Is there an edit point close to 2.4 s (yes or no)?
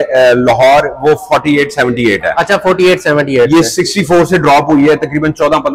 no